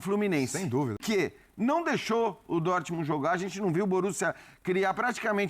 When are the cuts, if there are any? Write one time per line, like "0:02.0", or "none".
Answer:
0:01.0